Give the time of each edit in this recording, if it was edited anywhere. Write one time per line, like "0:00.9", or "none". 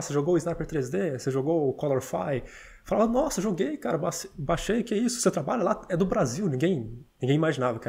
none